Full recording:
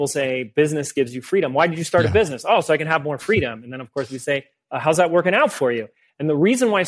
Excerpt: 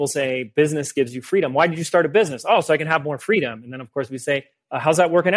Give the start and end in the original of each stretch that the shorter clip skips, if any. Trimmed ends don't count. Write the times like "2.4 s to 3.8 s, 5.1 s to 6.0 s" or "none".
none